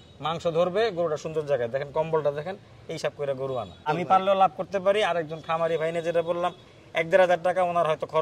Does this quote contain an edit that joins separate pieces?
yes; 1 cut; at 3.9 s

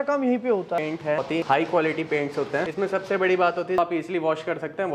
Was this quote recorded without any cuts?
no; 3 cuts; at 1.3 s, 2.7 s, 3.8 s

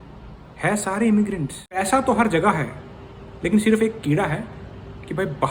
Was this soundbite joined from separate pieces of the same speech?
yes; 1 cut; at 1.8 s

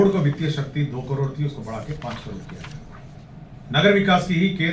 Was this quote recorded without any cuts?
no; 1 cut; at 3.2 s

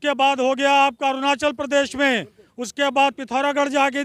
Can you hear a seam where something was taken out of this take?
no; 0 cuts

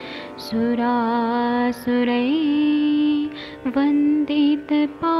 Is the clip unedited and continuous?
no; 1 cut; at 4.1 s

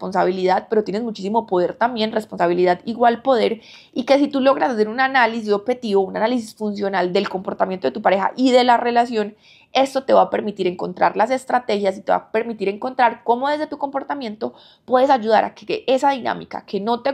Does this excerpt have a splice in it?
no; 0 cuts

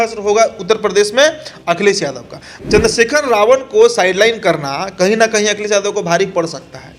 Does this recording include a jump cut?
yes; 1 cut; at 2.5 s

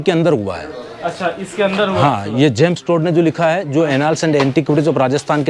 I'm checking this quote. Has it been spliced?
no; 0 cuts

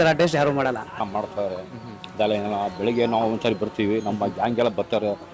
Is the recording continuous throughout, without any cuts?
no; 1 cut; at 1.0 s

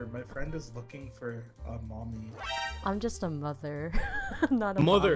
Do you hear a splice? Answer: no; 0 cuts

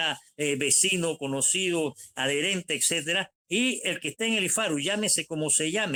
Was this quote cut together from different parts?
no; 0 cuts

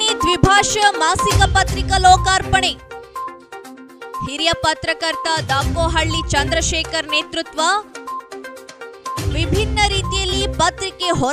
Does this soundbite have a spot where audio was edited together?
no; 0 cuts

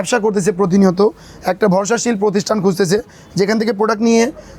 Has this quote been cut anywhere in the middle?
no; 0 cuts

